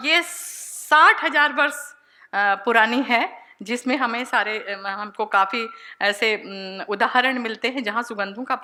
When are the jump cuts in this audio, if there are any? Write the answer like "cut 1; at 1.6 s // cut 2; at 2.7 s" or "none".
none